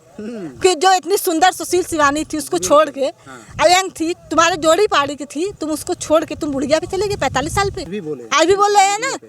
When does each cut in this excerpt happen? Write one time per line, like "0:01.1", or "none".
0:07.9